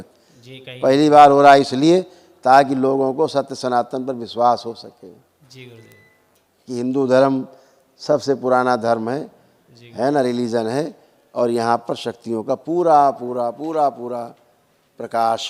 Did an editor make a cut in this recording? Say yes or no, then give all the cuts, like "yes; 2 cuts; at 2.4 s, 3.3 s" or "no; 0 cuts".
no; 0 cuts